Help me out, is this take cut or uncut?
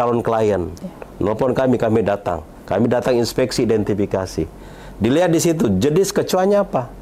uncut